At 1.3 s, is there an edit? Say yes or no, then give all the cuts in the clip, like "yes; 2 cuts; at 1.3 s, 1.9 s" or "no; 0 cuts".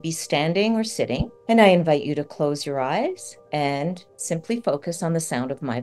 yes; 3 cuts; at 1.3 s, 3.3 s, 4.1 s